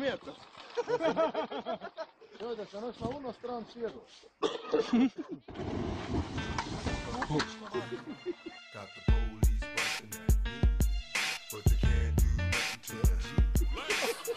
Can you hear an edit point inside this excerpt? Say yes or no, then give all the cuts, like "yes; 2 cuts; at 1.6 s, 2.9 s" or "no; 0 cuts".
no; 0 cuts